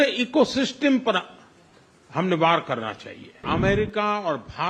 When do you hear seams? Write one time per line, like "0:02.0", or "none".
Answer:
0:03.4